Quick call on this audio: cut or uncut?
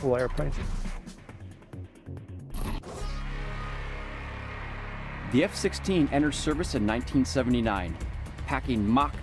uncut